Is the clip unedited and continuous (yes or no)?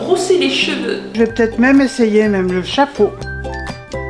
no